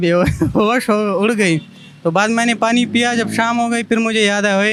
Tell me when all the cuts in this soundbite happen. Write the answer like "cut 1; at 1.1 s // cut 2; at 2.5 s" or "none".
none